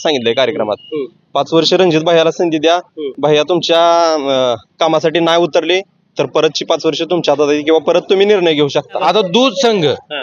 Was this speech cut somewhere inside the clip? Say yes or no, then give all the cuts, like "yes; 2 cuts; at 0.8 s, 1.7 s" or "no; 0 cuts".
yes; 1 cut; at 9.0 s